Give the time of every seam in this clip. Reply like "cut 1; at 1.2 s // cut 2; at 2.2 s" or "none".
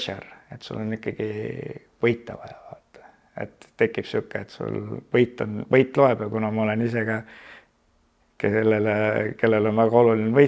none